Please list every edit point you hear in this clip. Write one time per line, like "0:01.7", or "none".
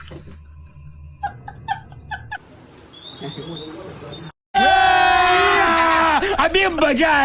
0:02.5